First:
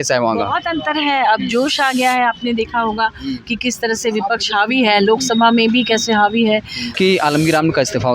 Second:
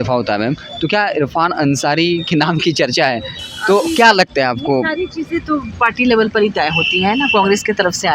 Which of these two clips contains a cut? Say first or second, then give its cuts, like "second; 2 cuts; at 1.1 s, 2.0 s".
first; 1 cut; at 6.8 s